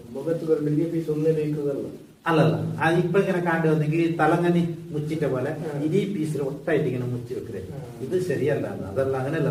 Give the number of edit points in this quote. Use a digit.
0